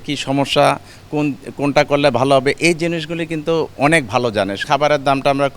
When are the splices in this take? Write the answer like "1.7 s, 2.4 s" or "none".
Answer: 4.6 s